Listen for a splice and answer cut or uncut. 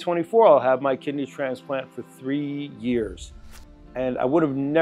uncut